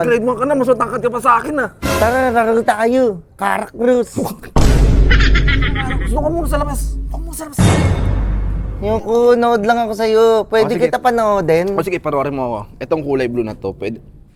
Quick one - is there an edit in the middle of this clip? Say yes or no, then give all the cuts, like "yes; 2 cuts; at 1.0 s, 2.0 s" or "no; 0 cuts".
no; 0 cuts